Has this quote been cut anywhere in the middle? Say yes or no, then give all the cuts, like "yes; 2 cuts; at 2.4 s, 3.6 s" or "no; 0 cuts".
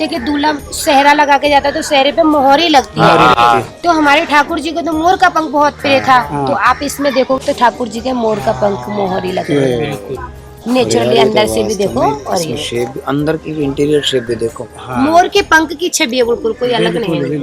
no; 0 cuts